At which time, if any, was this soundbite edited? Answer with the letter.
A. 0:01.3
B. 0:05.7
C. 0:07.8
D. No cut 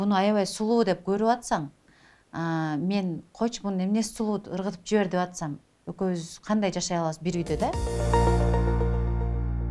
C